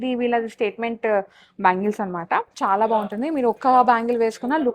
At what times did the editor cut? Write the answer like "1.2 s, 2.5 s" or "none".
2.5 s